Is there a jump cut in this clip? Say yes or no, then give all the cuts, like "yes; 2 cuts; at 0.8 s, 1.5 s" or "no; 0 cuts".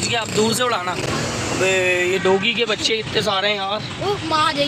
no; 0 cuts